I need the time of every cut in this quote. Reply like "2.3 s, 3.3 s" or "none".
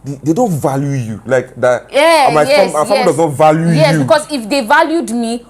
none